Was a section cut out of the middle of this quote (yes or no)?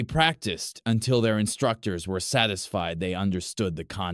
yes